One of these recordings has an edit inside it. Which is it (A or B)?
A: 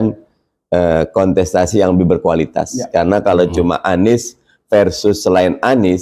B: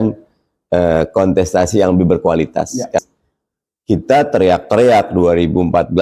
B